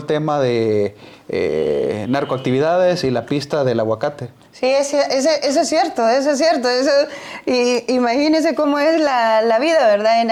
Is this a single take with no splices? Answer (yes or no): yes